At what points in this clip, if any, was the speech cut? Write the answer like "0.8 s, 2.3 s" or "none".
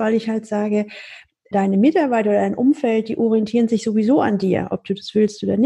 none